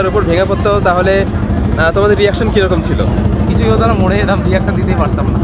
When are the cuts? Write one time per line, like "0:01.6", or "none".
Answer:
0:03.1